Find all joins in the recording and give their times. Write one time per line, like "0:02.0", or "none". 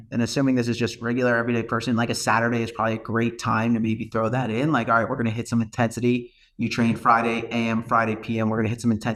none